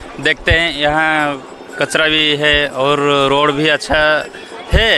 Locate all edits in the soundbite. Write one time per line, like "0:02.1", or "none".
none